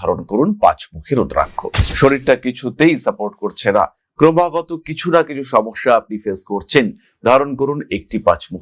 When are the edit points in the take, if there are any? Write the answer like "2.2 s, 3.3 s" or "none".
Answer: 1.7 s